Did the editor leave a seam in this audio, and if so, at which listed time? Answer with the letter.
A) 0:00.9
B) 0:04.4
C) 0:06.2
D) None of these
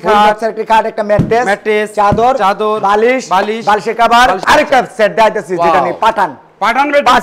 B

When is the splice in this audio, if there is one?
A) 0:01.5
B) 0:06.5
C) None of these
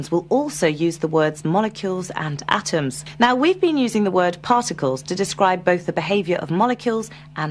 B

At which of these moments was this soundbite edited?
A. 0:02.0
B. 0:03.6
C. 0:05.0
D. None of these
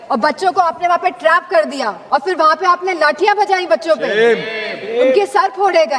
A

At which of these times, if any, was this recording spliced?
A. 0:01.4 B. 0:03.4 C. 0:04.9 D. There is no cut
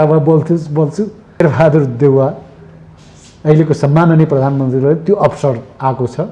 A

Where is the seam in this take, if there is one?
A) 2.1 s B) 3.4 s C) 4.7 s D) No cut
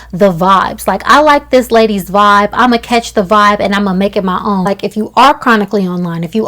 C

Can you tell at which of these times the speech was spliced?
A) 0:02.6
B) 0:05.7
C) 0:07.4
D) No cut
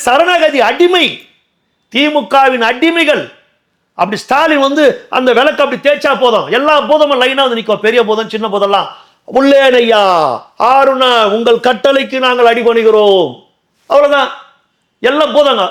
D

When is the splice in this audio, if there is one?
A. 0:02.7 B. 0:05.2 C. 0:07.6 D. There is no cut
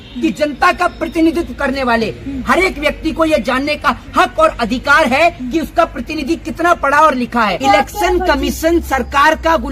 C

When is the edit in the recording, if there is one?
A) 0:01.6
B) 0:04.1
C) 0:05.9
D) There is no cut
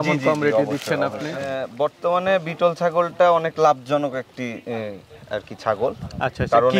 A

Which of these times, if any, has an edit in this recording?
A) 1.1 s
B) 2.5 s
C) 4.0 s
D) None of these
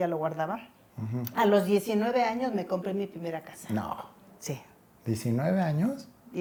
D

